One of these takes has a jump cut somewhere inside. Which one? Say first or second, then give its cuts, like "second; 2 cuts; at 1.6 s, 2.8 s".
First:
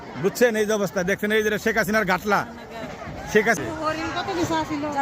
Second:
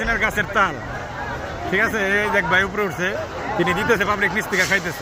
first; 1 cut; at 3.6 s